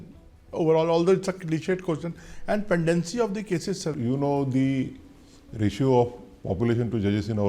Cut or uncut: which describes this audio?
cut